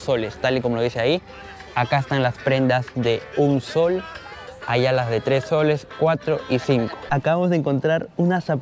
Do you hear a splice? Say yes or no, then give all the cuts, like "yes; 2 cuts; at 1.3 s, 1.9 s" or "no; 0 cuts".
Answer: yes; 1 cut; at 7.0 s